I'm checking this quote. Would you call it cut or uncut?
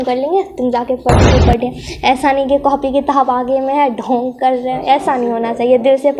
cut